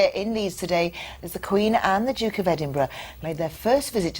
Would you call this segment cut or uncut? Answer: cut